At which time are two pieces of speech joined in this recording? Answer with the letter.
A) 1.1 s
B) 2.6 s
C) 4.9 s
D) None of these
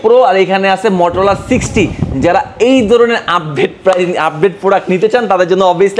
D